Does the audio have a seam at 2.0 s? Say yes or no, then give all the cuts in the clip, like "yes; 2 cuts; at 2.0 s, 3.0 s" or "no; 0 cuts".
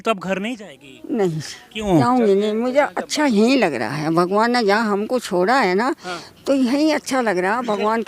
yes; 1 cut; at 2.0 s